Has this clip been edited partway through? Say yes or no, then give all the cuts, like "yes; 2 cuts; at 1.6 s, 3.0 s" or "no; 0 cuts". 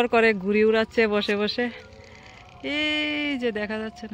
no; 0 cuts